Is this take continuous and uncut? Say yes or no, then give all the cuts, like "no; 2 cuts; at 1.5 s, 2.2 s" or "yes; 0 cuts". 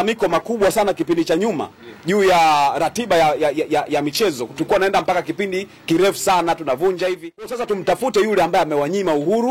no; 1 cut; at 7.7 s